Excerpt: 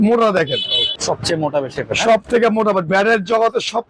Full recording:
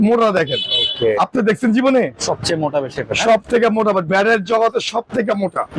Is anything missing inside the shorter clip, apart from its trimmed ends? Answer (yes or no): yes